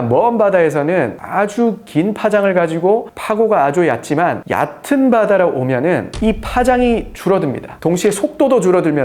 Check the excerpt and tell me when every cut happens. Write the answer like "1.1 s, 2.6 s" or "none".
none